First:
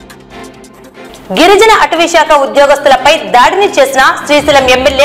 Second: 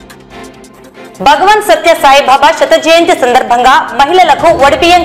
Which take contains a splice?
first; 1 cut; at 1.1 s

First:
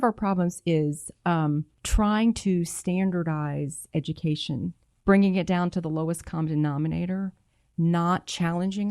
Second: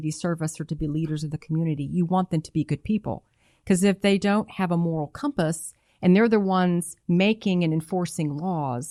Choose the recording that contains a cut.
first; 2 cuts; at 1.8 s, 4.8 s

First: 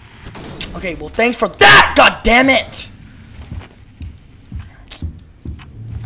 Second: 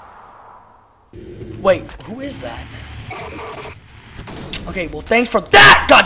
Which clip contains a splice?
second; 1 cut; at 1.1 s

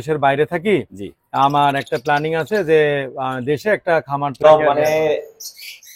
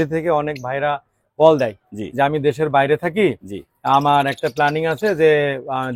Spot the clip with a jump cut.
first; 1 cut; at 4.4 s

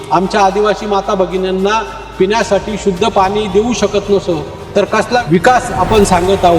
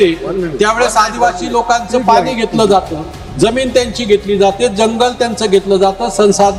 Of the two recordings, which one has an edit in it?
first; 1 cut; at 5.2 s

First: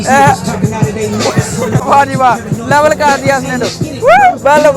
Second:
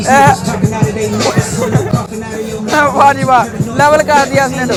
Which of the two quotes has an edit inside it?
first; 1 cut; at 1.8 s

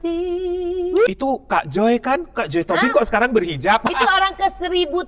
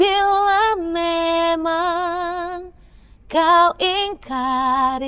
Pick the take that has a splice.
first; 2 cuts; at 1.1 s, 3.9 s

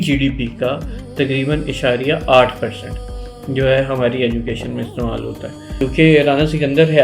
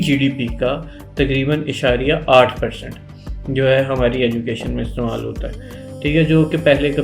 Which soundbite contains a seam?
first; 1 cut; at 5.8 s

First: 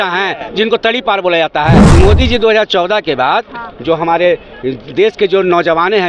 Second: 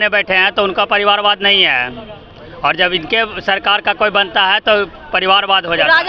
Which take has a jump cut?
first; 1 cut; at 1.9 s

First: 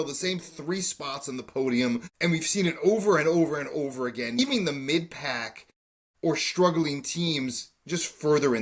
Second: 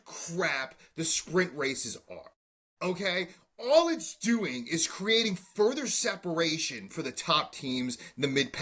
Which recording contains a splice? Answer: first; 2 cuts; at 2.1 s, 4.4 s

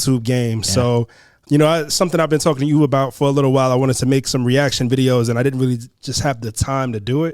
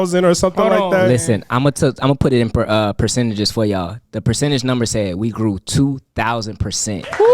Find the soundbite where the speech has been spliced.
first; 1 cut; at 1.4 s

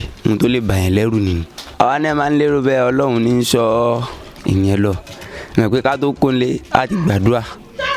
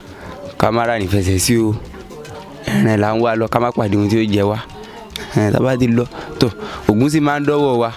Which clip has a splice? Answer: first; 1 cut; at 1.6 s

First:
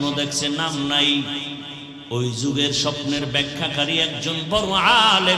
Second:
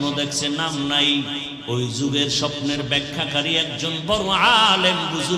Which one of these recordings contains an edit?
second; 1 cut; at 1.5 s

